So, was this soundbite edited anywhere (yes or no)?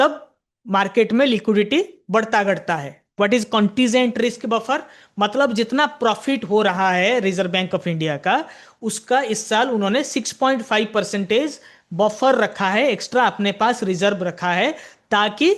yes